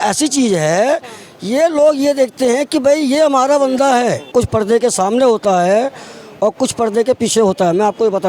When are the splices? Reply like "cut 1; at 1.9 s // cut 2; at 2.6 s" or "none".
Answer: cut 1; at 4.3 s